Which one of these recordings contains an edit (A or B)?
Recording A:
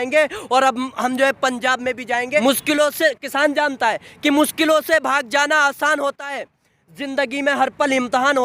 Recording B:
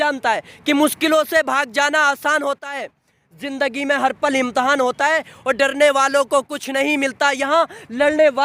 A